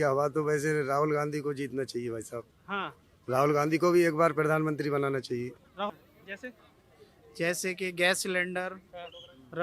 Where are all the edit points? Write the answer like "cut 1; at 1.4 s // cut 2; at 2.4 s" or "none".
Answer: cut 1; at 5.9 s